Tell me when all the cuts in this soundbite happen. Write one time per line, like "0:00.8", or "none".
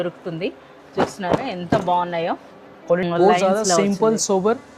0:03.0